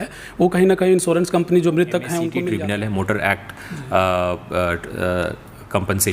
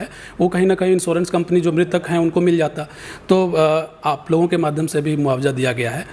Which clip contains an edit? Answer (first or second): first